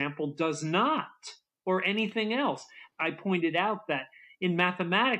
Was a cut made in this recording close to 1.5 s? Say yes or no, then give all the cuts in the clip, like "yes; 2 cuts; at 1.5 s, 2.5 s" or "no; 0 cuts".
no; 1 cut; at 2.8 s